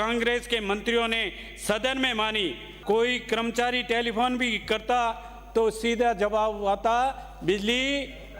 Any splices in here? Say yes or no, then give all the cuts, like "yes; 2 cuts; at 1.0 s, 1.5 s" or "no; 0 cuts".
yes; 1 cut; at 2.7 s